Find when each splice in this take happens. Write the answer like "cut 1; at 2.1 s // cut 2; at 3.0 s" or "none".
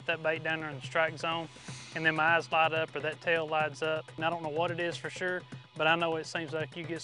cut 1; at 4.2 s